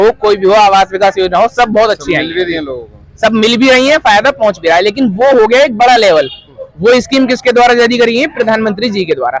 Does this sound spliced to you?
no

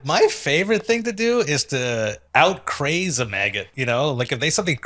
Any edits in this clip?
yes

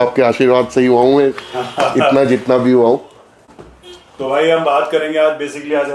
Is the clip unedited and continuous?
yes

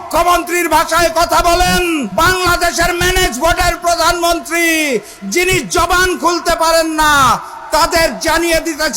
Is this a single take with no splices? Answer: no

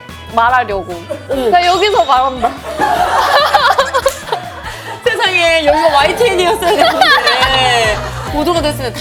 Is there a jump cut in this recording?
no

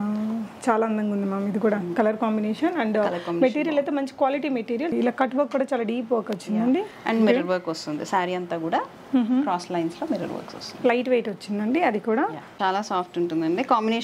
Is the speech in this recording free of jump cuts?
no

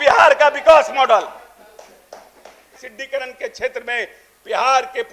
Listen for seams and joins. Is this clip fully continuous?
no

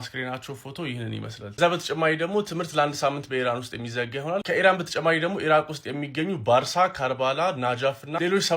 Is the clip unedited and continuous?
yes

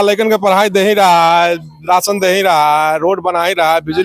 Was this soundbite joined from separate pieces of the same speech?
no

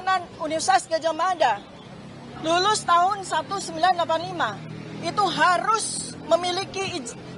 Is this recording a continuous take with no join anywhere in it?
yes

